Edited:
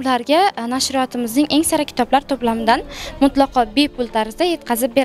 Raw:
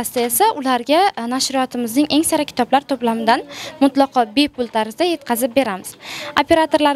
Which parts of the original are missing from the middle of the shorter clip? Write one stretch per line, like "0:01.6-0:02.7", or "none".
none